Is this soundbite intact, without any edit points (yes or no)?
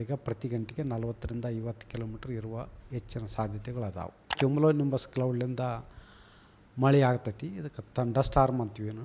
no